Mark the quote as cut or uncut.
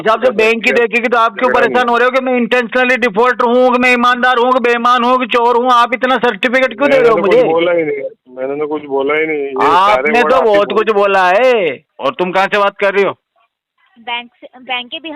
cut